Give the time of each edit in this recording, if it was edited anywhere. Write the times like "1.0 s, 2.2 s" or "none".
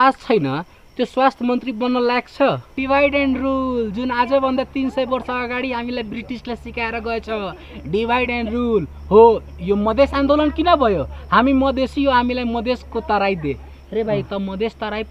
2.8 s